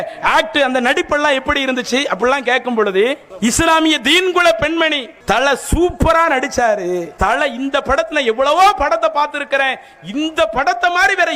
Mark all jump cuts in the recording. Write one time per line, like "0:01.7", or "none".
0:03.3
0:05.1
0:07.1